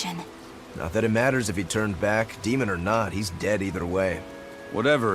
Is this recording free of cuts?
no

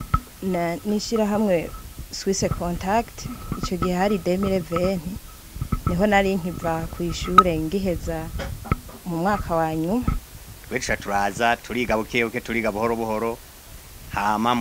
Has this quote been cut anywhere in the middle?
yes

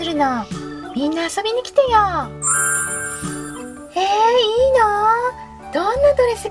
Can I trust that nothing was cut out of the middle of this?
yes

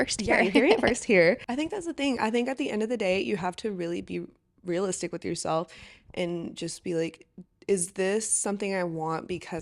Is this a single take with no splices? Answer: no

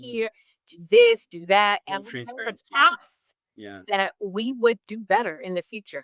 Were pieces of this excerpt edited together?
no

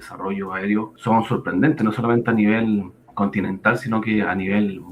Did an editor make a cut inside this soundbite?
yes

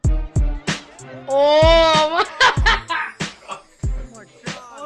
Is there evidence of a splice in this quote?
no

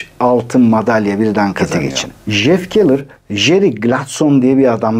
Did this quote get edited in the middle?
yes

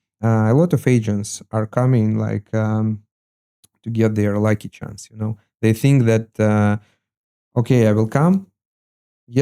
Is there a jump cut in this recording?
no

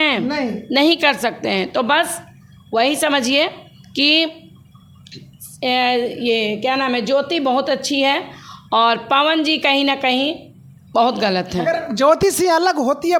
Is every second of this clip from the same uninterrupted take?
yes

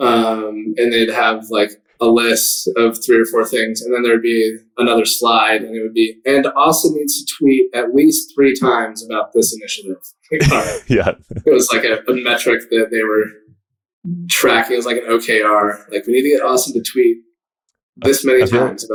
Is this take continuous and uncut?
yes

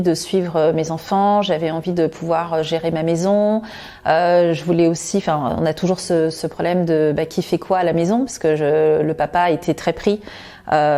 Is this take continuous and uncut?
yes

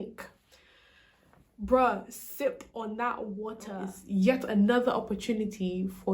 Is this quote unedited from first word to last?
no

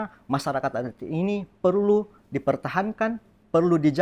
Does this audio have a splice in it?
no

